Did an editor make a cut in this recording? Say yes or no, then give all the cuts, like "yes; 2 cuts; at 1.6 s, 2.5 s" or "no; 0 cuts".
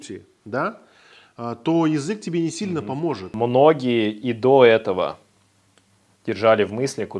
yes; 1 cut; at 3.3 s